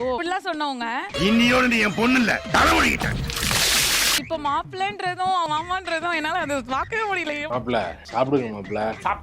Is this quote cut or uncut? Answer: cut